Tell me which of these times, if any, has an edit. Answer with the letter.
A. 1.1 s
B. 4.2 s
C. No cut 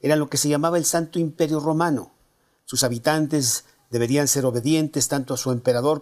A